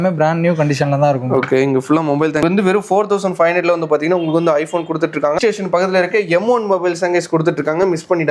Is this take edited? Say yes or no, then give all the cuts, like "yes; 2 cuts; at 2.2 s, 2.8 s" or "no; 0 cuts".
yes; 2 cuts; at 2.4 s, 5.4 s